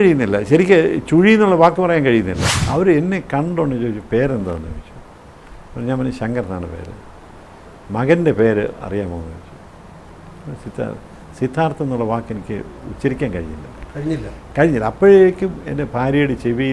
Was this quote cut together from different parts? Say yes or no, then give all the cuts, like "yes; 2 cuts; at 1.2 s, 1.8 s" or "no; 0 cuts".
yes; 1 cut; at 2.6 s